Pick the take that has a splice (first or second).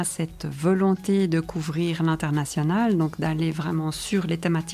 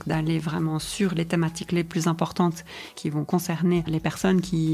second